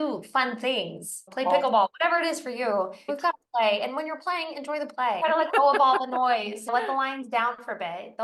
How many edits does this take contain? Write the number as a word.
four